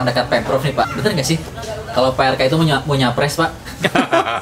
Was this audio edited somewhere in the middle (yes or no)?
no